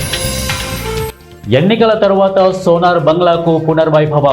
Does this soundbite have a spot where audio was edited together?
yes; 1 cut; at 1.2 s

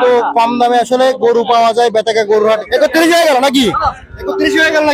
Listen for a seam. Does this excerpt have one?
yes; 1 cut; at 2.6 s

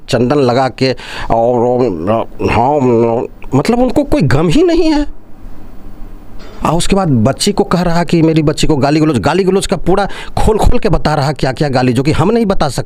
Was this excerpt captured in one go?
yes; 0 cuts

